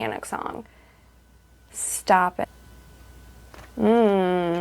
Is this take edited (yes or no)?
yes